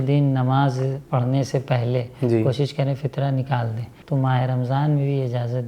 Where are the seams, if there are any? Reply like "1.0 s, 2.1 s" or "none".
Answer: 3.9 s